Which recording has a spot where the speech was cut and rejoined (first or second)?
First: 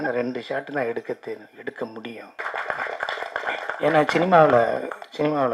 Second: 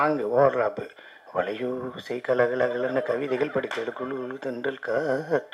first